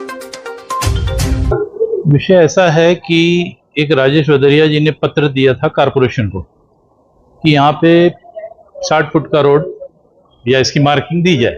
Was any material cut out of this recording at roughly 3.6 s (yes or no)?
no